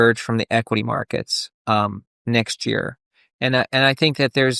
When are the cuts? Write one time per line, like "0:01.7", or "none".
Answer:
0:02.1

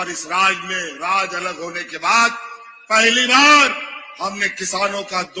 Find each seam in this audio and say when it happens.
none

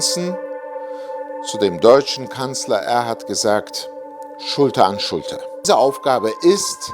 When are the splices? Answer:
0:05.6

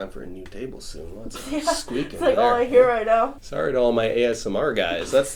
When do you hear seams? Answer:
0:03.4

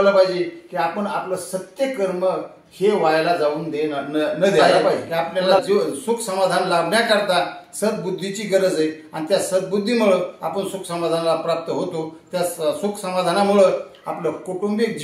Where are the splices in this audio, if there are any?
0:05.6

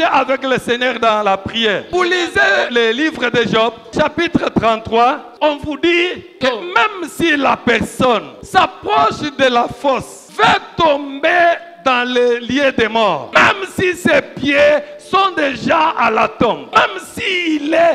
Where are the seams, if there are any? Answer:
0:01.9
0:02.7
0:03.9
0:05.3
0:06.3
0:08.4
0:10.2
0:13.2
0:16.6

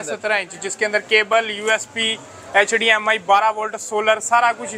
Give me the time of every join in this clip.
none

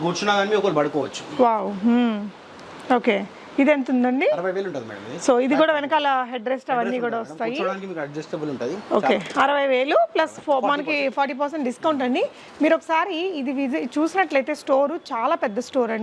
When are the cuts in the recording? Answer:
none

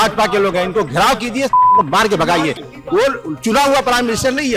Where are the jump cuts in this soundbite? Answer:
0:02.6

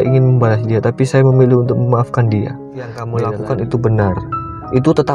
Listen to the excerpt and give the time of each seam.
0:03.0

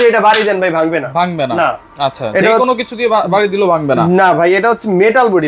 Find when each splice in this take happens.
none

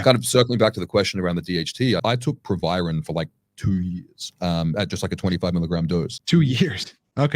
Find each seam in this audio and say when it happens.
0:02.0
0:06.2

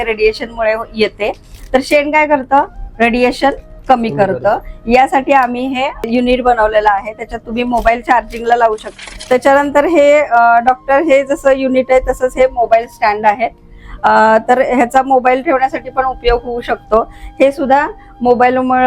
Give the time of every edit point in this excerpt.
none

